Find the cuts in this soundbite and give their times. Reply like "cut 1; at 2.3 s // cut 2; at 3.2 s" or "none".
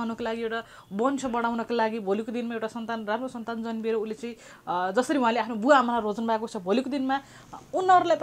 none